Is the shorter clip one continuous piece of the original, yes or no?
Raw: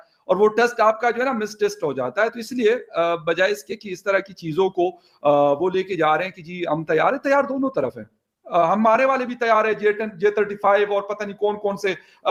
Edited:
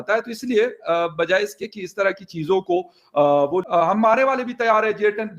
no